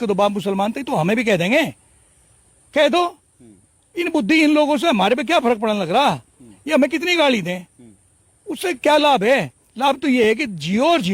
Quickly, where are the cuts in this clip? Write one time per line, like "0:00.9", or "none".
none